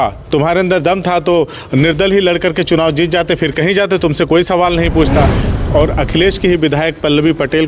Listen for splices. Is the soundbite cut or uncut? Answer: cut